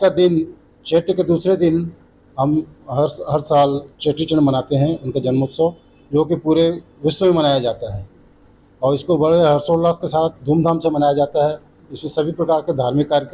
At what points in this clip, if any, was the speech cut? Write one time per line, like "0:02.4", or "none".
none